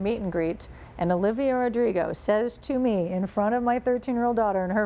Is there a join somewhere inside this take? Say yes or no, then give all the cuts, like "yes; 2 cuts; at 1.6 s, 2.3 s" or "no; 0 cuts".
no; 0 cuts